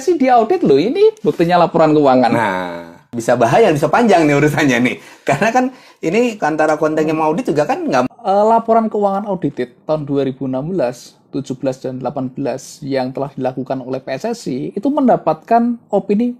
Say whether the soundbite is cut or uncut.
cut